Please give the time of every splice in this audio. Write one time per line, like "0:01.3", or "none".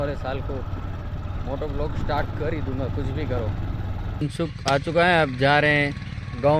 0:04.2